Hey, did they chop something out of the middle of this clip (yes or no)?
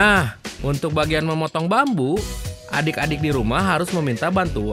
no